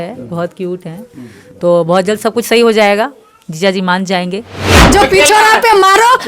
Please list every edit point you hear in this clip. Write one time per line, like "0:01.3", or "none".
0:04.8